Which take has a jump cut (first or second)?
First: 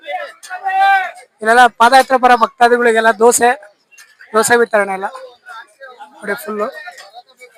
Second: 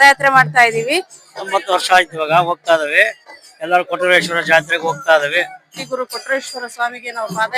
second